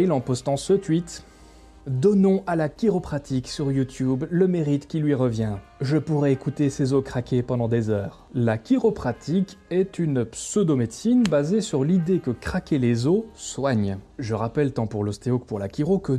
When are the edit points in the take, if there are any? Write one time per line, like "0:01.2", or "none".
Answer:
0:14.1